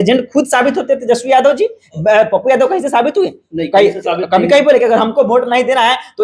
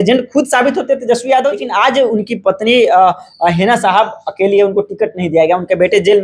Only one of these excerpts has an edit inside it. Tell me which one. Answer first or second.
second